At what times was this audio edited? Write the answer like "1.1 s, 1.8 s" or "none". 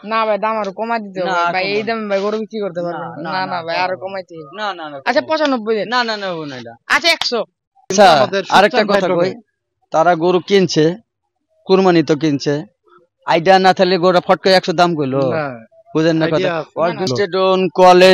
7.9 s, 17.1 s